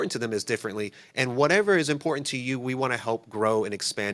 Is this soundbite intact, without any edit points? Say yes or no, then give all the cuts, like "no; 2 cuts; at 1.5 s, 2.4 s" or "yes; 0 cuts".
yes; 0 cuts